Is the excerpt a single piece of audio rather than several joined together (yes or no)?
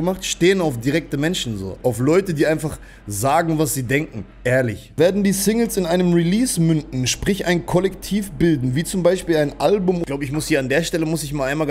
no